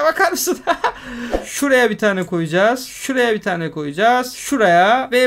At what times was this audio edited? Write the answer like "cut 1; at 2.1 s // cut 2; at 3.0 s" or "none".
cut 1; at 1.4 s